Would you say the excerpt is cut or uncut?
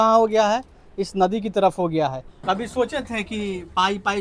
cut